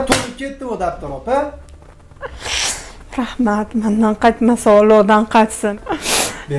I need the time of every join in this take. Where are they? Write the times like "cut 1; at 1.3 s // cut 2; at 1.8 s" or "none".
cut 1; at 5.6 s

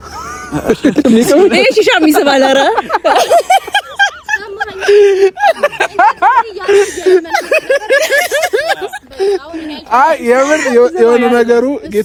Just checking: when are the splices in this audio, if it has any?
none

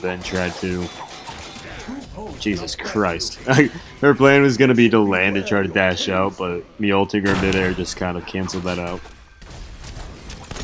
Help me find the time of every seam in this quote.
cut 1; at 9.4 s

